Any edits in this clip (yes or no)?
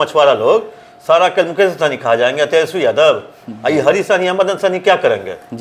no